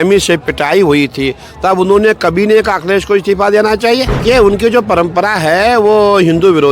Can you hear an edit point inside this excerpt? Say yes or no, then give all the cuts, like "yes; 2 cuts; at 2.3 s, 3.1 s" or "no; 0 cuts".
yes; 1 cut; at 4.2 s